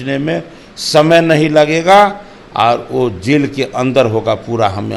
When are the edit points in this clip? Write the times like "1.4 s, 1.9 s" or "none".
none